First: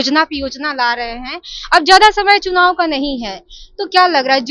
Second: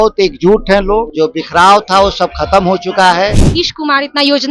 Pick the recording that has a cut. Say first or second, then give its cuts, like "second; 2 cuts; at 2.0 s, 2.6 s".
second; 2 cuts; at 1.1 s, 3.4 s